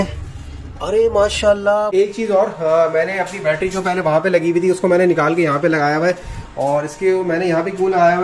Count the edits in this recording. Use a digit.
1